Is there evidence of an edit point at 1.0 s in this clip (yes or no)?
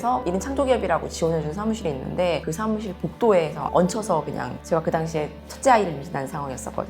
no